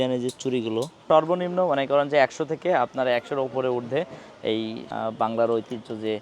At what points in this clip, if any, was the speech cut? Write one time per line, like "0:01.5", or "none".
0:01.0
0:04.8